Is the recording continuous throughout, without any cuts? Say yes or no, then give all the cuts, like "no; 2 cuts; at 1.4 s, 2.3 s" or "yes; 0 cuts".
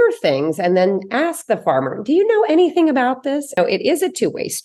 no; 1 cut; at 3.6 s